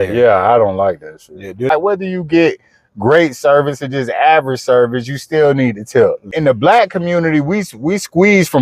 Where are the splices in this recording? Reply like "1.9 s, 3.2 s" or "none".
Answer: 1.7 s, 6.3 s